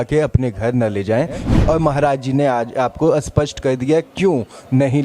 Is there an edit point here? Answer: yes; 1 cut; at 1.5 s

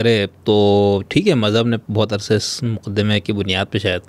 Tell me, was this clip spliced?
no; 0 cuts

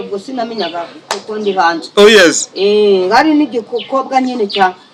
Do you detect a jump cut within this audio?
no; 0 cuts

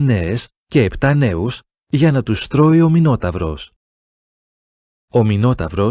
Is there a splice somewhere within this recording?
yes; 1 cut; at 2.3 s

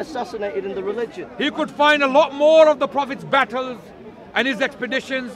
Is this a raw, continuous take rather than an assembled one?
no; 1 cut; at 1.2 s

